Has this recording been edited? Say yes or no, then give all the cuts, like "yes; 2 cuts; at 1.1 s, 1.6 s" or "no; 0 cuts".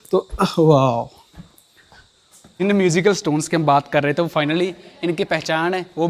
yes; 1 cut; at 2.7 s